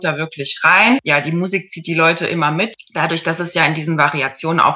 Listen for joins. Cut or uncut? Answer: cut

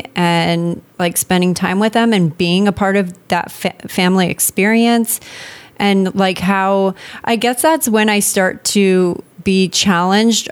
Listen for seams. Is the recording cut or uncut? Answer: uncut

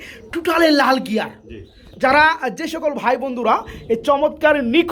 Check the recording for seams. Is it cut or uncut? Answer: uncut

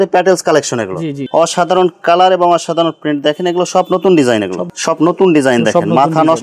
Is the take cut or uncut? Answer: cut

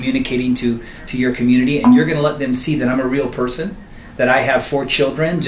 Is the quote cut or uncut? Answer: uncut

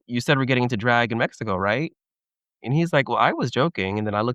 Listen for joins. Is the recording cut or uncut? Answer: uncut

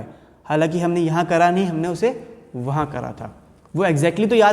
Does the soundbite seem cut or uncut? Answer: uncut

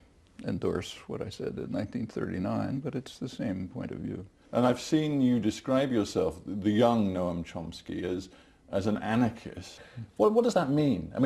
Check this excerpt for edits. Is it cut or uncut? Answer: cut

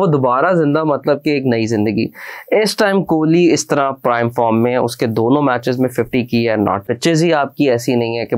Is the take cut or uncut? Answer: cut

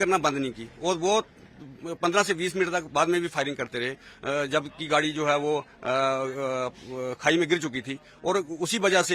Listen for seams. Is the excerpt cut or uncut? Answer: uncut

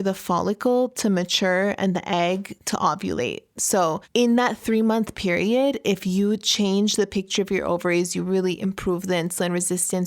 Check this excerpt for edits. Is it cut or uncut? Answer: cut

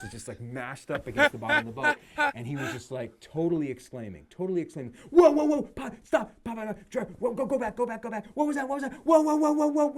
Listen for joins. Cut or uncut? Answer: uncut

